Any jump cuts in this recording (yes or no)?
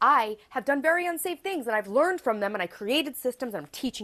no